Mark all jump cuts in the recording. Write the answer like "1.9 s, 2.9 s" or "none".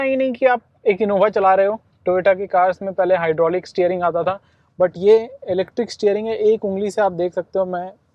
none